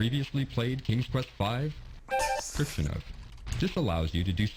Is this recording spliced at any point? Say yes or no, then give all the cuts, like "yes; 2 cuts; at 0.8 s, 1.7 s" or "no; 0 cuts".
yes; 1 cut; at 2.5 s